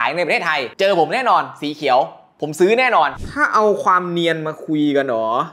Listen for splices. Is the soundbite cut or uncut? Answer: cut